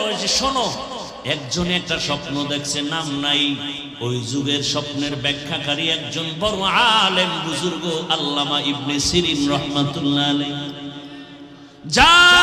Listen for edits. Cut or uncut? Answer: cut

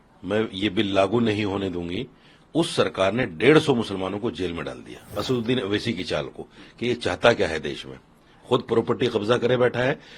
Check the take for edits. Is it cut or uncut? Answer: cut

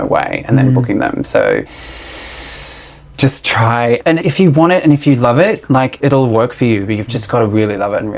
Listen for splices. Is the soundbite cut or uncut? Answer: cut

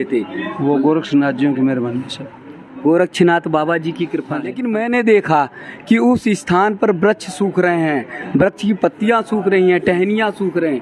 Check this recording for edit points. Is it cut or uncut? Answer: cut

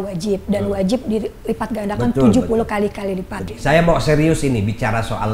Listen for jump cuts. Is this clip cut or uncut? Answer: cut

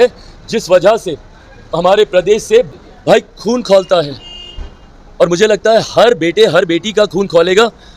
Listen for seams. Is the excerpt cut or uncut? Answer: cut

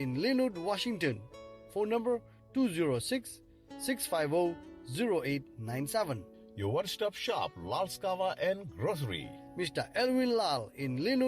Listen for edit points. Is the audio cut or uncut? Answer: cut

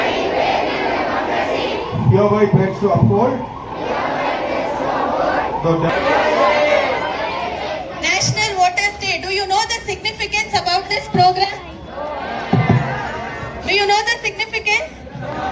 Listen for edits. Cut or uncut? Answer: cut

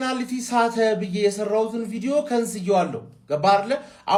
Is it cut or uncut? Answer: uncut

